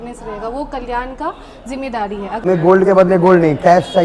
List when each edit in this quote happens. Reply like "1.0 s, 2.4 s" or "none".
2.4 s